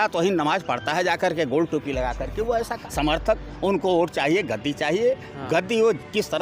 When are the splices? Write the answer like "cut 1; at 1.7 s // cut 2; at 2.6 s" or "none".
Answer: cut 1; at 2.8 s